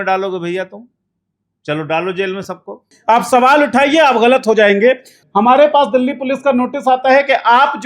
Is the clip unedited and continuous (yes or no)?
no